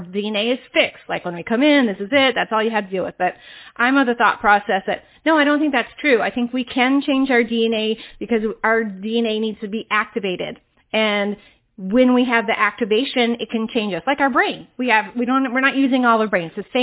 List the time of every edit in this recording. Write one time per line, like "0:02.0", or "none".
none